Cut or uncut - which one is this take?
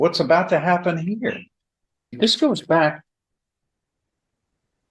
cut